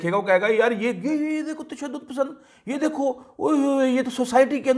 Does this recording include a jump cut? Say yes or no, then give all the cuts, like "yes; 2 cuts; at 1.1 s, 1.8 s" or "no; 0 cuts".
no; 0 cuts